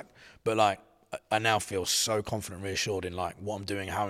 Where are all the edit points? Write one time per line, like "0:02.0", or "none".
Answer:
none